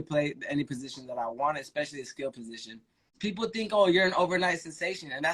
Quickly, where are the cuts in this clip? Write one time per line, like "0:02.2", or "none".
0:03.1